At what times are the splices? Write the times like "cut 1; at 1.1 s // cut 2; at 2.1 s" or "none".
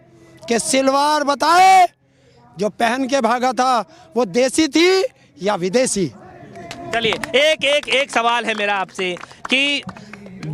none